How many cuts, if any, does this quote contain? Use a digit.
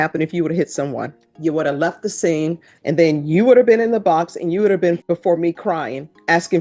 3